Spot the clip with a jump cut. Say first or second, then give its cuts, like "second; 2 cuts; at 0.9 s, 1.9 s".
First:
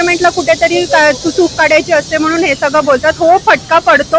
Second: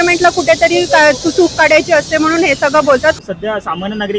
second; 1 cut; at 3.2 s